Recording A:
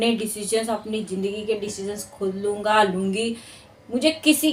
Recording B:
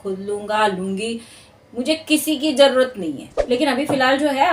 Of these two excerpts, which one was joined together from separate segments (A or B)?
B